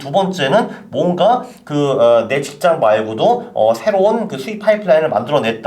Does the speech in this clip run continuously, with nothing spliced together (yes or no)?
yes